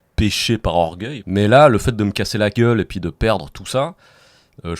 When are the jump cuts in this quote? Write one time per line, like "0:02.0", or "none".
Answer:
0:01.1